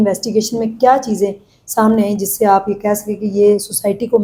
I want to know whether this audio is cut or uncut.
uncut